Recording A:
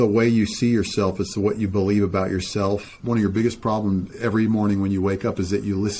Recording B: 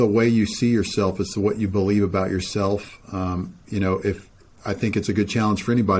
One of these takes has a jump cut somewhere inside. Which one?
A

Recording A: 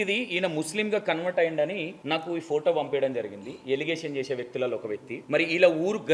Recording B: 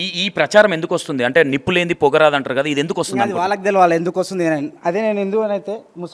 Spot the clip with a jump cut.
A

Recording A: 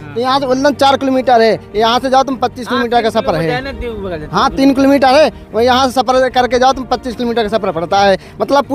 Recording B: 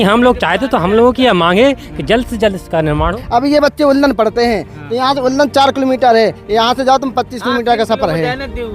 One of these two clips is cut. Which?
B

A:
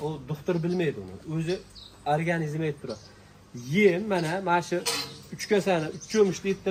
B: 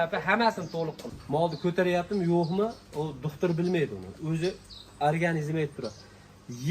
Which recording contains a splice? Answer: B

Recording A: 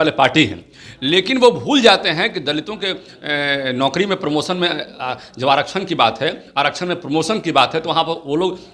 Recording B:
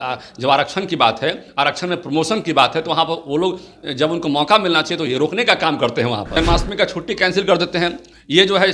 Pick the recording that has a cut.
B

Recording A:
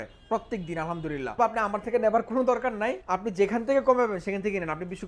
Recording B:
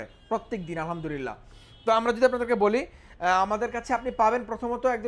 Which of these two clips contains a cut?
A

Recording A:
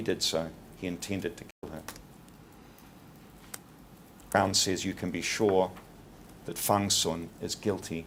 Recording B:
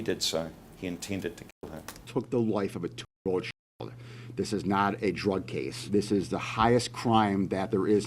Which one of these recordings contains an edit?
B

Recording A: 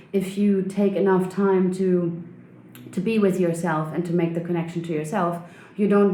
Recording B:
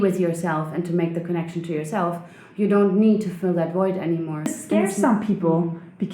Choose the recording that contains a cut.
B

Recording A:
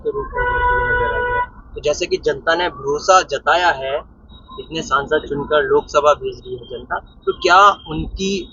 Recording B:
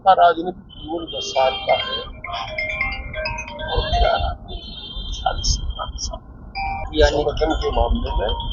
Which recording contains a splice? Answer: B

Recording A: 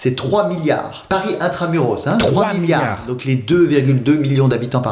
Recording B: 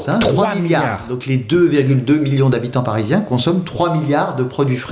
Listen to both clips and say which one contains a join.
A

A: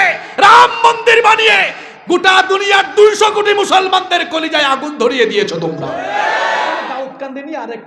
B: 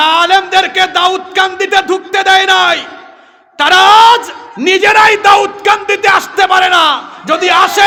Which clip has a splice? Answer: A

